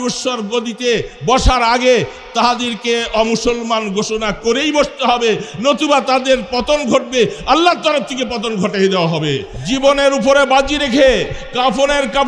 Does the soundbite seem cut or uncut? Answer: cut